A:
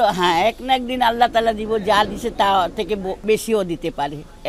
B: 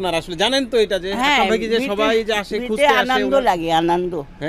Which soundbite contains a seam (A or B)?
A